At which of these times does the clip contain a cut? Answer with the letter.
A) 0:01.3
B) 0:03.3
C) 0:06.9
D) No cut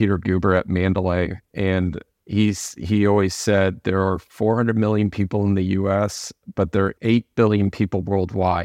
C